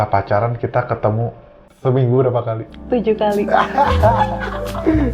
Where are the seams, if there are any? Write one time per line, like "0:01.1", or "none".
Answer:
0:01.7